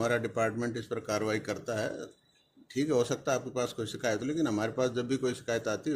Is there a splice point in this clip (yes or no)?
no